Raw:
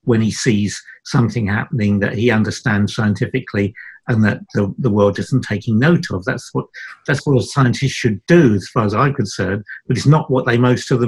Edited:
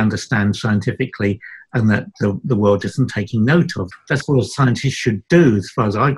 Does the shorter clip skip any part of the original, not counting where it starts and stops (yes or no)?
yes